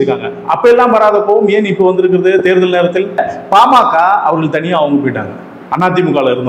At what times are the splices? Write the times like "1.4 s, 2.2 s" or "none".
3.3 s